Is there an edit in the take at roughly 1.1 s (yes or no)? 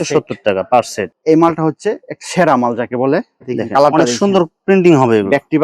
yes